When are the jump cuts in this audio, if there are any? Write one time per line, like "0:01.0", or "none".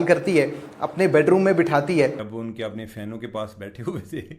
0:02.3